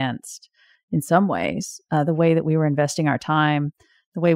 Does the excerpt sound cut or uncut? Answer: uncut